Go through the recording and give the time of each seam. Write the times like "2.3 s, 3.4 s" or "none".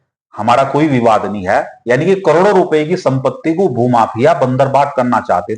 none